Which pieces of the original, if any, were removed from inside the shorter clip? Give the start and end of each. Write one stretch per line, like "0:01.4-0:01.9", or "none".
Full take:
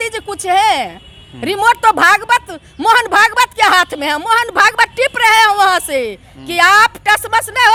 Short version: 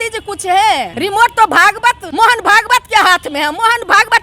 0:00.9-0:01.4
0:02.5-0:02.7